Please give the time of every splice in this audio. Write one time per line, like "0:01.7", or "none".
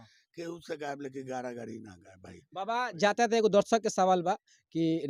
none

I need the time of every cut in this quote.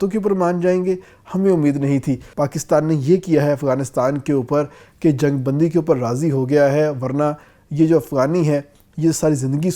0:02.3

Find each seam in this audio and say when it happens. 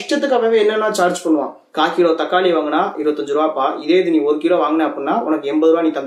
0:01.7

